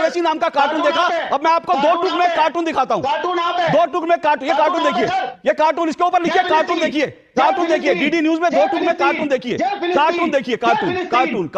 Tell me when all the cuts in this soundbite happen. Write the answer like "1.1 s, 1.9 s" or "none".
none